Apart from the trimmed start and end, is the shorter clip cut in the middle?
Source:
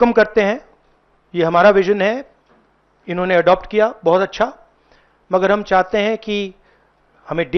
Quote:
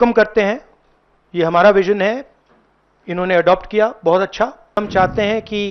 yes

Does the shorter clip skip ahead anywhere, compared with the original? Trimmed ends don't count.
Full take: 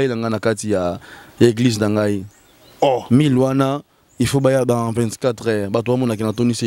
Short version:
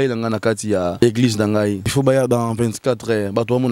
yes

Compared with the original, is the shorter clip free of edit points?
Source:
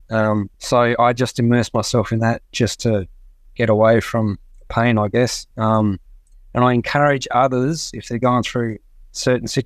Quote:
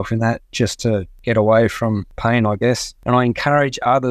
no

